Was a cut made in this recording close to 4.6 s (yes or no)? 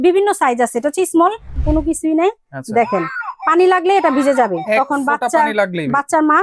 no